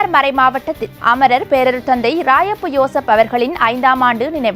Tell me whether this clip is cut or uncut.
uncut